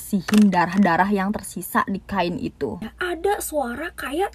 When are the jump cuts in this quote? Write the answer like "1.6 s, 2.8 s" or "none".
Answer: 2.9 s

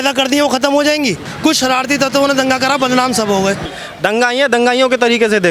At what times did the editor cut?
1.3 s, 3.7 s

